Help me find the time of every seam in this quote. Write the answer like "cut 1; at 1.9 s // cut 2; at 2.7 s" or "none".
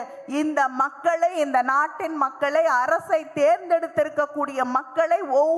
none